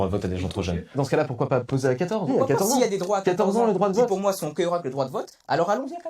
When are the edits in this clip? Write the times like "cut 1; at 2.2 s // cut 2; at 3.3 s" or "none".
cut 1; at 0.9 s // cut 2; at 2.3 s